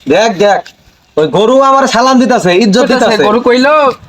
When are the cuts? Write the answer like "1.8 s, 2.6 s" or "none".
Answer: 3.2 s